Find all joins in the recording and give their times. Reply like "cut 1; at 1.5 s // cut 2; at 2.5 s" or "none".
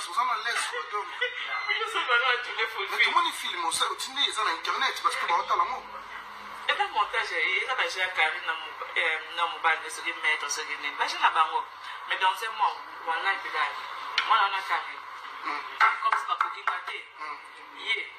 cut 1; at 4.1 s

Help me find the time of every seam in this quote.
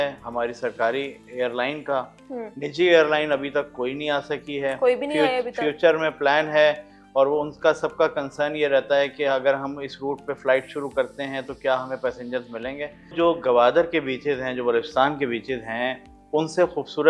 cut 1; at 13.1 s

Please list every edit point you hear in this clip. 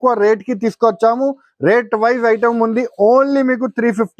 none

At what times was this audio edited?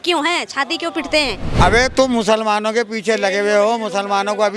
cut 1; at 1.4 s

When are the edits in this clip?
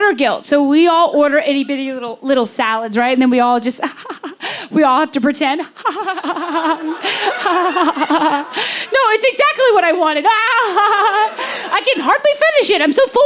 none

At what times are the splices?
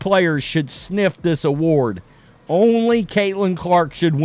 none

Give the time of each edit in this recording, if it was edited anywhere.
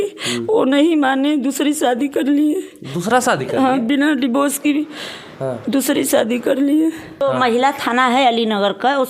cut 1; at 7.2 s

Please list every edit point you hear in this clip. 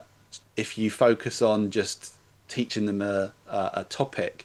none

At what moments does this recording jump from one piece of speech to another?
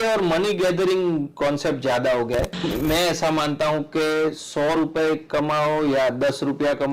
cut 1; at 2.7 s

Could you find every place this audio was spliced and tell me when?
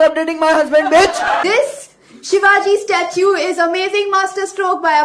cut 1; at 1.4 s

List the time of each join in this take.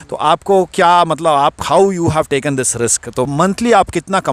cut 1; at 3.3 s

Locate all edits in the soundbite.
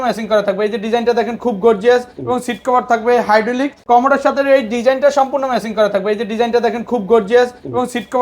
cut 1; at 3.7 s

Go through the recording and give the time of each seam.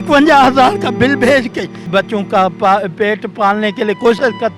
cut 1; at 1.8 s

